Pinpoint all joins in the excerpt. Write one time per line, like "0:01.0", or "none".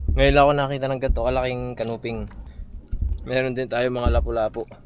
0:02.3